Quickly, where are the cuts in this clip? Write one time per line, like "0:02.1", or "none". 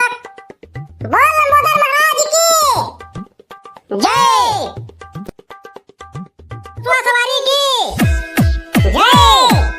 0:06.9